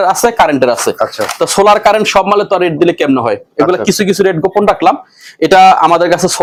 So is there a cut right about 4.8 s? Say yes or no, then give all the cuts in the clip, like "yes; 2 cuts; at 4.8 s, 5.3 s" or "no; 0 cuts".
no; 0 cuts